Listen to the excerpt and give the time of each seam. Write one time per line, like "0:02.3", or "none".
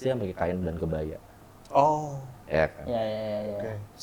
none